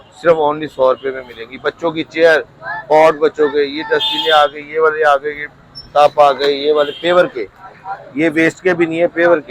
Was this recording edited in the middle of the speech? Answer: no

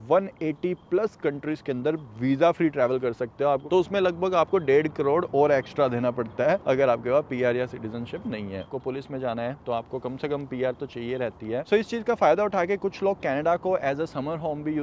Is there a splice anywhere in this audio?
yes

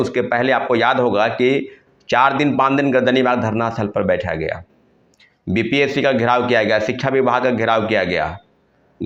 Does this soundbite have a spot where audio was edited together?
no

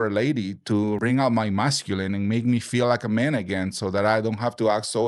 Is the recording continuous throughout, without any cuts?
no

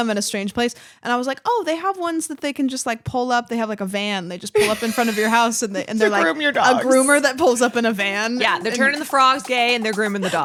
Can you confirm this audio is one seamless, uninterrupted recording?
yes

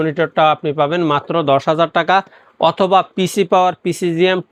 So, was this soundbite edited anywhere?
no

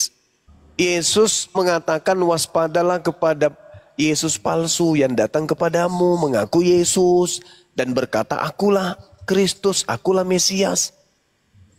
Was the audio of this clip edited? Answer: no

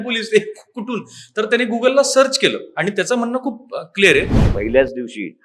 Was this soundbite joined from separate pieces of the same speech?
yes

